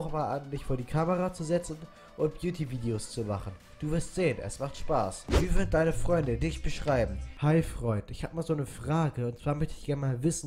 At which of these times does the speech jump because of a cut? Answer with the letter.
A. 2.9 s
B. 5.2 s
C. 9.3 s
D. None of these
B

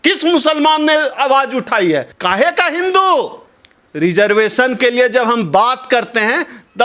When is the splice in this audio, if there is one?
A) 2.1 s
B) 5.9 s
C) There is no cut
A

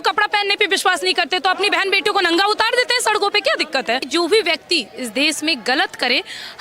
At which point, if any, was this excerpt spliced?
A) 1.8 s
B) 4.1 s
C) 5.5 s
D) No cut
B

